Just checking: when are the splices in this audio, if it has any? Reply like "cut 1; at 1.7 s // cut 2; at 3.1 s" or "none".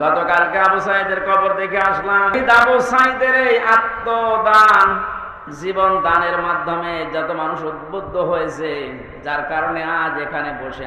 cut 1; at 2.3 s